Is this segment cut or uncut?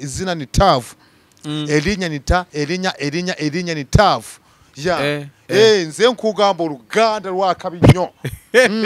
uncut